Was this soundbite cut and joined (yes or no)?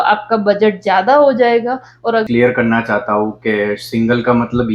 yes